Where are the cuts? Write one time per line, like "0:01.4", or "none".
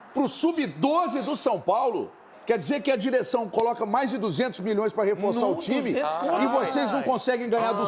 none